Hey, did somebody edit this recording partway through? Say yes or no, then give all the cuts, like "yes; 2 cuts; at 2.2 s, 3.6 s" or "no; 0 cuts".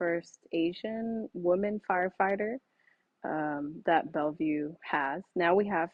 no; 0 cuts